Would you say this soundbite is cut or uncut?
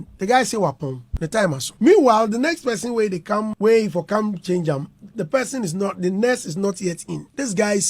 uncut